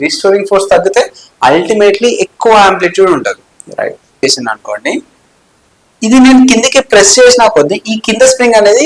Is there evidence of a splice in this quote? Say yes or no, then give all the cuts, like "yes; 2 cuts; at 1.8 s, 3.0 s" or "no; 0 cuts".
yes; 1 cut; at 4.2 s